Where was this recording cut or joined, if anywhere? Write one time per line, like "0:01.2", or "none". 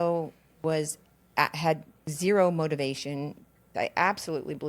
0:03.7